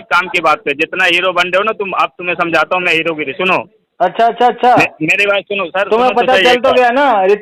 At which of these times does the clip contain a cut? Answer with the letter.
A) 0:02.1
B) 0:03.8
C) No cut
C